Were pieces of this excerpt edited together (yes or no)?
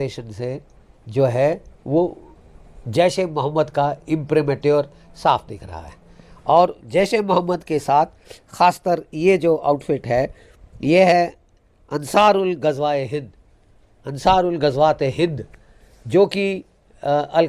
no